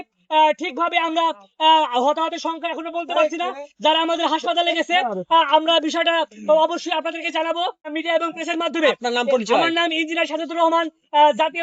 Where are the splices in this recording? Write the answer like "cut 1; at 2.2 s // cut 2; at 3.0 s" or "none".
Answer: cut 1; at 7.9 s